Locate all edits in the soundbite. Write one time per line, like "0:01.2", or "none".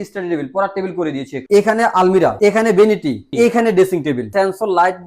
0:01.3
0:02.3
0:03.3
0:04.3